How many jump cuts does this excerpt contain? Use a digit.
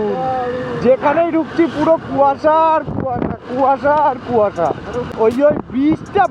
1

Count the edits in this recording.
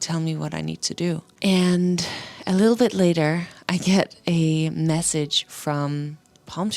1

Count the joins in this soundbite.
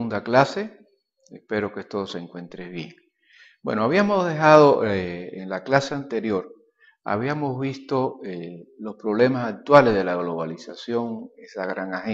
0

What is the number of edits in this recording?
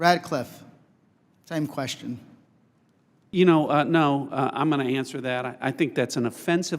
1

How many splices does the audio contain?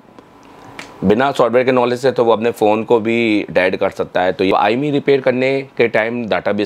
1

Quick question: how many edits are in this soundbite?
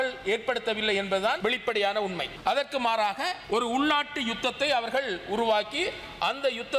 3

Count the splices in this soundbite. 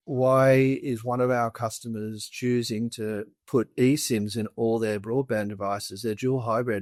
0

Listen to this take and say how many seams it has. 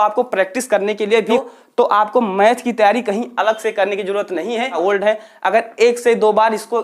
2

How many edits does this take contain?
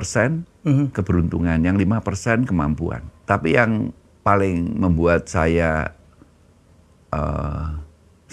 1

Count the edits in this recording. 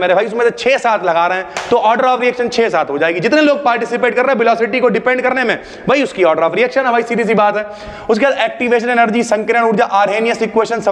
0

